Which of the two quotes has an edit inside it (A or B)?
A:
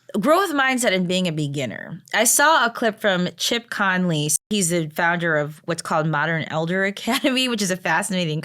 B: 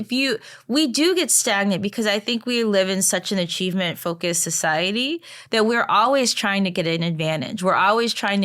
A